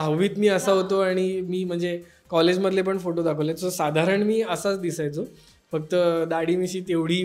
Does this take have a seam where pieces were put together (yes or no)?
no